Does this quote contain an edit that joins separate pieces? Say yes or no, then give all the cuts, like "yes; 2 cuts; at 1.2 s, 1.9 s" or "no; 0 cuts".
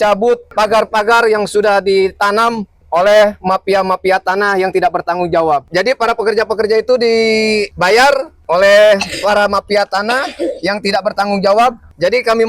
yes; 1 cut; at 5.7 s